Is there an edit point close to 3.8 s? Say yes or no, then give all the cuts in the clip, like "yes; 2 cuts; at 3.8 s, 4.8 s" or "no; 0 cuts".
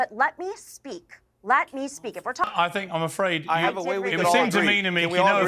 no; 1 cut; at 2.4 s